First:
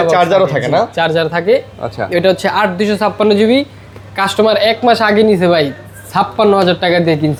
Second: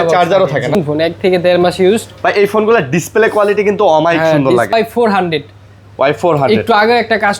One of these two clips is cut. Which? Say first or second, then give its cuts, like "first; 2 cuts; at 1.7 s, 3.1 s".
second; 2 cuts; at 0.8 s, 4.7 s